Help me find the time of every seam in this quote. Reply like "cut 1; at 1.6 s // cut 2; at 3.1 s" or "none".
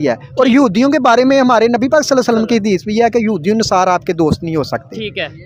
none

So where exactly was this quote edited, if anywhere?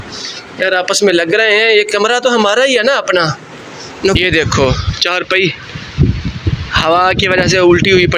cut 1; at 4.2 s

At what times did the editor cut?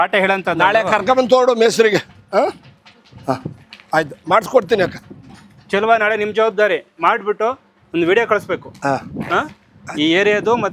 none

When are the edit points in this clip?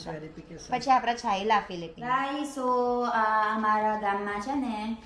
cut 1; at 1.9 s

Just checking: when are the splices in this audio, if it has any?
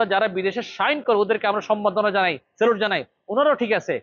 none

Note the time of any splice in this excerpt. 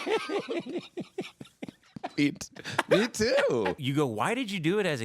cut 1; at 3.8 s

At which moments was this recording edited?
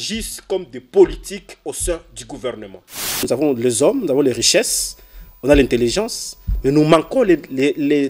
cut 1; at 3.2 s

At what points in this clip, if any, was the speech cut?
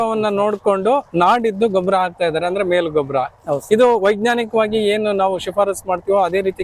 none

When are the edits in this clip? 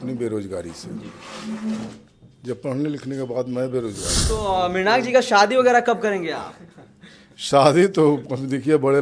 cut 1; at 4.1 s

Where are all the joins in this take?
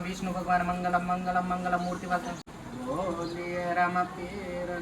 cut 1; at 2.5 s

